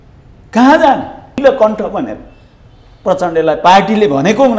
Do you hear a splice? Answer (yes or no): yes